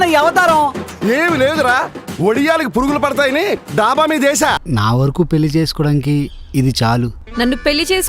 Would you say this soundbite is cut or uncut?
cut